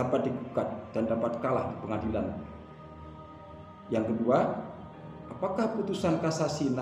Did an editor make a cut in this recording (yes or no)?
no